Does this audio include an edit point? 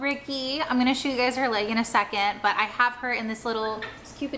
no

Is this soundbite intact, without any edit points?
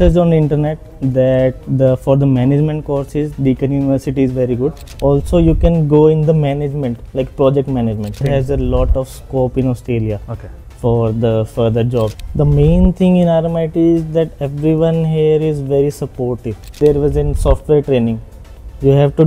no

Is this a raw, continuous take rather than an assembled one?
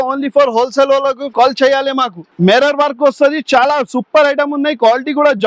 no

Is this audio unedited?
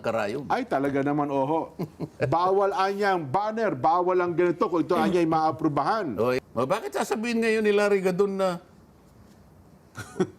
no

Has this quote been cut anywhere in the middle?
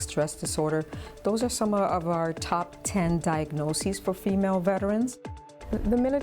yes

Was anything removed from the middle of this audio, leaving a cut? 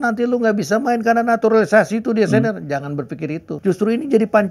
yes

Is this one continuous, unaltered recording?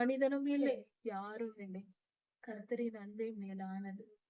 no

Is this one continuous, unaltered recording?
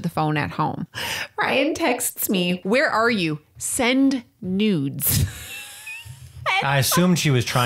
no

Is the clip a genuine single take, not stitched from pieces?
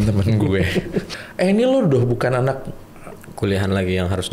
no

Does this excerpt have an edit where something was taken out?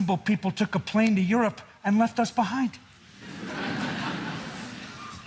no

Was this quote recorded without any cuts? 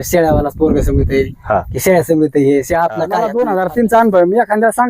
no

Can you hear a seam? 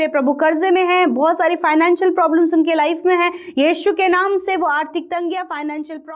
no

